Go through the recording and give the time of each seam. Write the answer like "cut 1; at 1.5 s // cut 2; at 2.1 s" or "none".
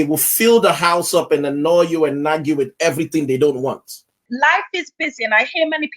cut 1; at 4.2 s